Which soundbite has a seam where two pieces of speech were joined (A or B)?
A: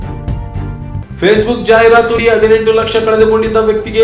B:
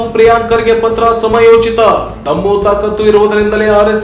A